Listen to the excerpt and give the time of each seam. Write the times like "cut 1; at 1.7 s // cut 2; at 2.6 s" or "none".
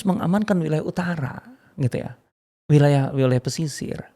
none